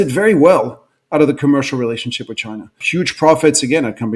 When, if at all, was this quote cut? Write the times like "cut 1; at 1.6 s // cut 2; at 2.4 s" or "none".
cut 1; at 2.8 s